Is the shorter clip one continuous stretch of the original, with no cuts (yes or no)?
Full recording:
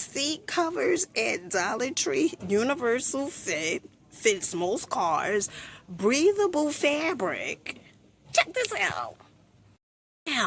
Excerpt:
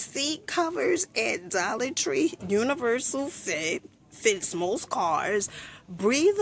yes